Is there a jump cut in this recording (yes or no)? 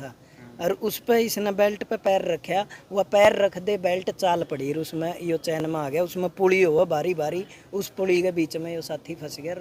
no